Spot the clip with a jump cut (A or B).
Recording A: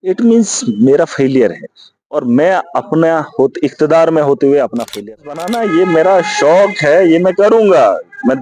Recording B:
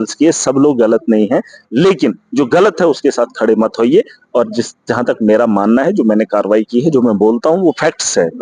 A